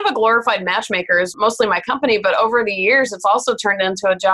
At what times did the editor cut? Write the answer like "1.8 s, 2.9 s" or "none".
1.3 s